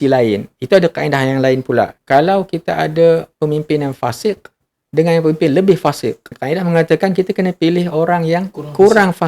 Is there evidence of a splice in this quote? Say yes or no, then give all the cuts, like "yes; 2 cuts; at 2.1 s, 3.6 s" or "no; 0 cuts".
yes; 2 cuts; at 2.0 s, 6.4 s